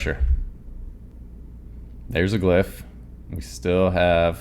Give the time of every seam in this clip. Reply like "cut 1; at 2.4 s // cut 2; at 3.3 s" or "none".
cut 1; at 1.1 s